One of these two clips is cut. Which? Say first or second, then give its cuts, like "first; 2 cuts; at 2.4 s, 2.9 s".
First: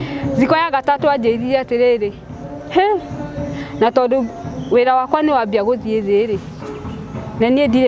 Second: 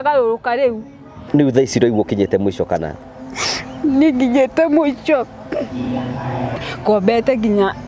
second; 2 cuts; at 1.1 s, 6.6 s